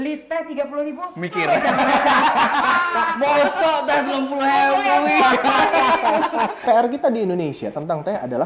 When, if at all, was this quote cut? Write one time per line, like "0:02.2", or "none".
0:06.6